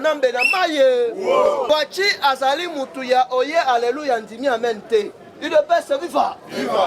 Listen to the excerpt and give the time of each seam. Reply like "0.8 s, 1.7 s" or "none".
1.6 s